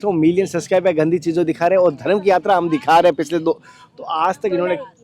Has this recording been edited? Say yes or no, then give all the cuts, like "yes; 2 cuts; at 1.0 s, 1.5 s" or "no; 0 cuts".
no; 0 cuts